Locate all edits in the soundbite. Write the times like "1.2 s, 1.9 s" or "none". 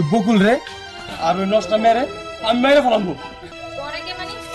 3.5 s